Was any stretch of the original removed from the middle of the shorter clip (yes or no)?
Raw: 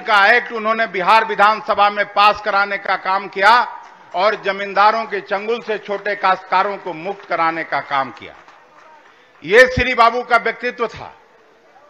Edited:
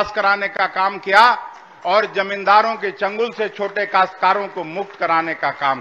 no